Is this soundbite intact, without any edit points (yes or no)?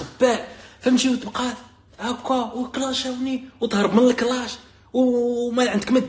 yes